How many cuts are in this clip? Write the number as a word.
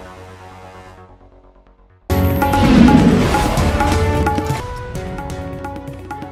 zero